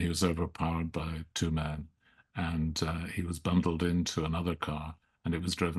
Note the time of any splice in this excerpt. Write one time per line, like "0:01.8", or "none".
none